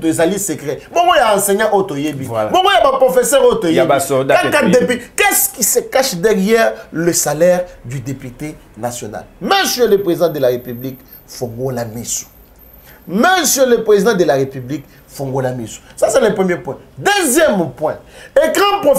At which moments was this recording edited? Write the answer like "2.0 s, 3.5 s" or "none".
none